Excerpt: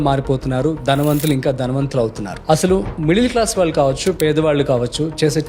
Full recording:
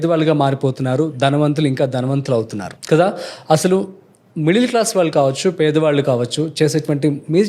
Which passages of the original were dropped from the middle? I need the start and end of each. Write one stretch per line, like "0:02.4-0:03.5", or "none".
0:02.8-0:03.9